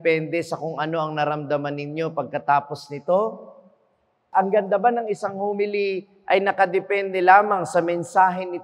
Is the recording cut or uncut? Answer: cut